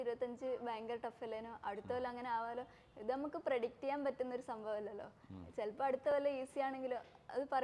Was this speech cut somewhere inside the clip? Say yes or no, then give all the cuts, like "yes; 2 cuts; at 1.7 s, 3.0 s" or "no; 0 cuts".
no; 0 cuts